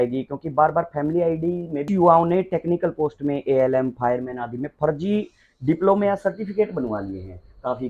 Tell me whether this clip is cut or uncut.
cut